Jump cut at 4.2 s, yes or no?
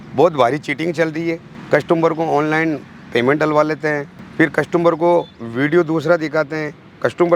yes